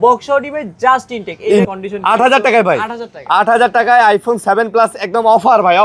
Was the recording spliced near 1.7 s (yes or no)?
yes